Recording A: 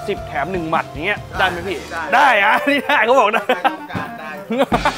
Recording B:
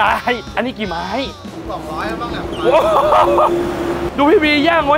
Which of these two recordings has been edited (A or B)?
B